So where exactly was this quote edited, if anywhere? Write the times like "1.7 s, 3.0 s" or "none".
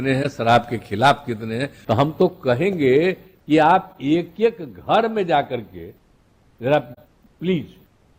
1.7 s